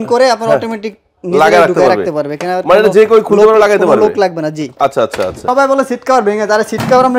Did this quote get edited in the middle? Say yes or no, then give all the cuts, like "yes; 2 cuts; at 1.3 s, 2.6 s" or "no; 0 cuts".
yes; 1 cut; at 5.4 s